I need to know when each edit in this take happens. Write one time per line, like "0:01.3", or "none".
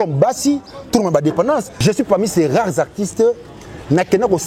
0:01.7